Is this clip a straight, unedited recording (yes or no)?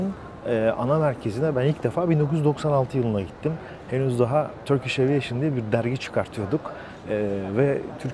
yes